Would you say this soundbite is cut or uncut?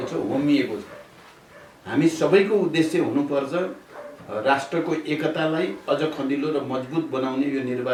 uncut